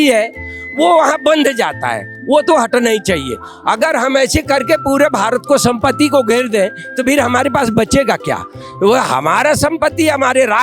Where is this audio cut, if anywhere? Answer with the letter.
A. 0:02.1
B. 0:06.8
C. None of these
A